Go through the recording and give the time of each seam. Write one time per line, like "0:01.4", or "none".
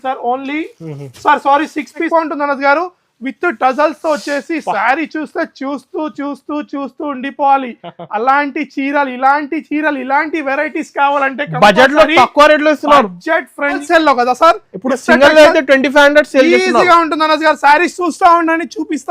0:02.1
0:13.8